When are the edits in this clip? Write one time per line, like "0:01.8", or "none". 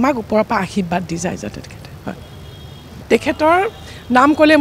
0:02.9